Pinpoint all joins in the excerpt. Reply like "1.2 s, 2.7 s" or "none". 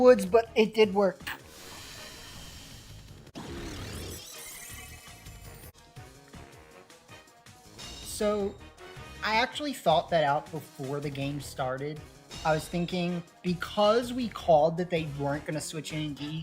3.3 s, 5.7 s